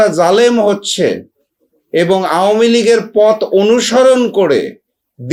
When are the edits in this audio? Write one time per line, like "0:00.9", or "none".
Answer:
none